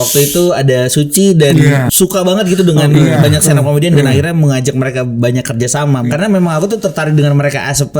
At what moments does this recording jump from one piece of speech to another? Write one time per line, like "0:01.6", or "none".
0:01.8
0:06.0